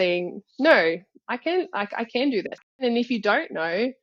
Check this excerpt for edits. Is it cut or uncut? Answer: cut